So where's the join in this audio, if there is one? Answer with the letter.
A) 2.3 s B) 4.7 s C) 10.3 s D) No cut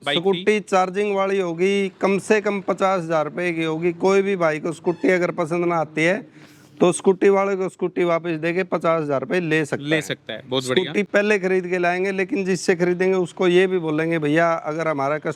D